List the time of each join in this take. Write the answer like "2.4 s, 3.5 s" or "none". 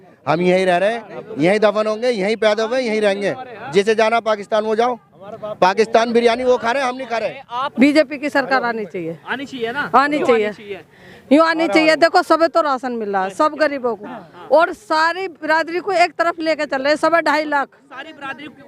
7.6 s